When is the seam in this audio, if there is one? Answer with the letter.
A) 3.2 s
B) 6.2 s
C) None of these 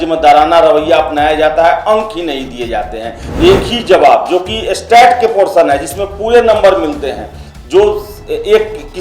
A